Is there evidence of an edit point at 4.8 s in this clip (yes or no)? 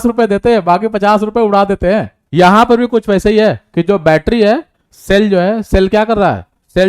no